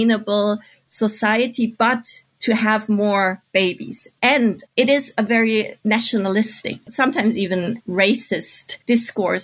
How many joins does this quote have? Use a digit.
3